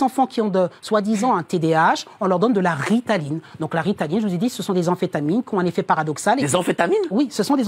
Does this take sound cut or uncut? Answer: uncut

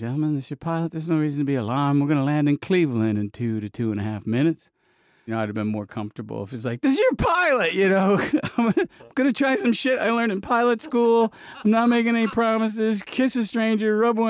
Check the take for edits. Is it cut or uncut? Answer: cut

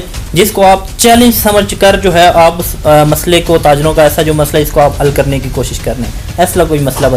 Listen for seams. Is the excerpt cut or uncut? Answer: uncut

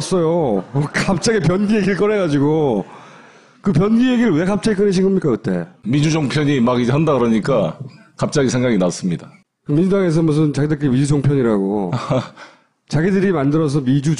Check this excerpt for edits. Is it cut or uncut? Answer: uncut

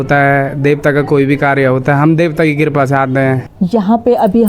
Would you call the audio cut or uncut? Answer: cut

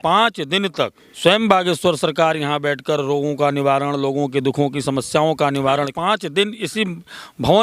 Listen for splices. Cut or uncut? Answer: cut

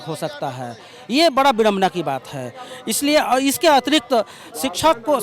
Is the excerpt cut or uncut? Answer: uncut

